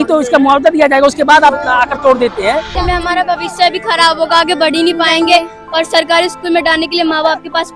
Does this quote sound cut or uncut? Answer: cut